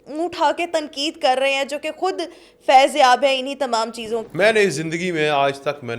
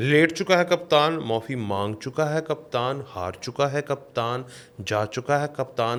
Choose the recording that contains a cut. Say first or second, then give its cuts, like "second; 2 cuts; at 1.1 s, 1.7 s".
first; 1 cut; at 4.2 s